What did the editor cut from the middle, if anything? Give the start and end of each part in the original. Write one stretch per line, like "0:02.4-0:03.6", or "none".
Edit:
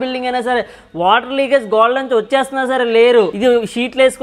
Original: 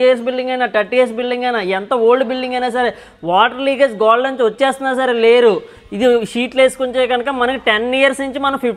0:05.6-0:05.9